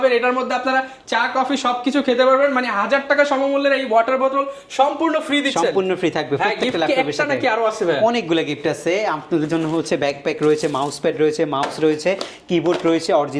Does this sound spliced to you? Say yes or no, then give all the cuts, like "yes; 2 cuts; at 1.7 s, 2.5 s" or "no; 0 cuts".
no; 0 cuts